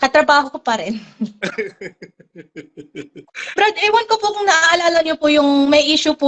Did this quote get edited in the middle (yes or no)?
yes